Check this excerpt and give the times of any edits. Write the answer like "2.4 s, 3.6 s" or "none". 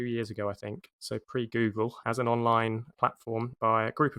0.8 s, 2.0 s, 3.0 s